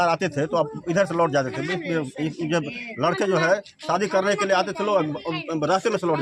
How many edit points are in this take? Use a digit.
0